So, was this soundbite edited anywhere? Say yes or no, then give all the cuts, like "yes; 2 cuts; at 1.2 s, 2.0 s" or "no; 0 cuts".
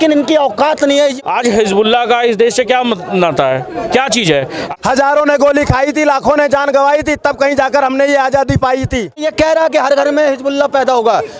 yes; 3 cuts; at 1.1 s, 4.6 s, 9.3 s